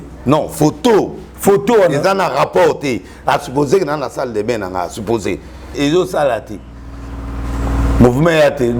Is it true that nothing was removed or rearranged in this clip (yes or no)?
no